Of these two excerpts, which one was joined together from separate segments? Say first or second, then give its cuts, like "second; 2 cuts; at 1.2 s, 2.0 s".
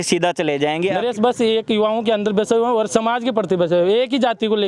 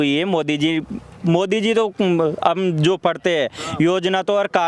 first; 1 cut; at 1.0 s